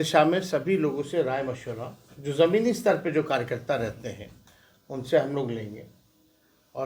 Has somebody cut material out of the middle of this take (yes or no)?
no